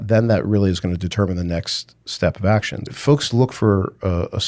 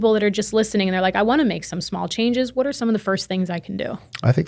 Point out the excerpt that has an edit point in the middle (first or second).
first